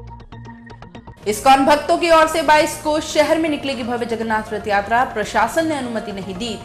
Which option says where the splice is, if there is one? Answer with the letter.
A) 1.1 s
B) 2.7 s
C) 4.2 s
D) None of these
A